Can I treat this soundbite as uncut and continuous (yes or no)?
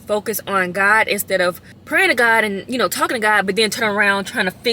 no